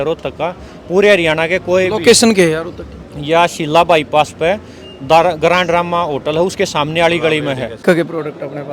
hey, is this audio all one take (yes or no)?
no